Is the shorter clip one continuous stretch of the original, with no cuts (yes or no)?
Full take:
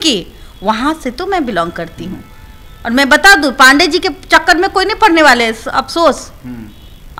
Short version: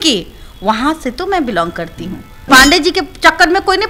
no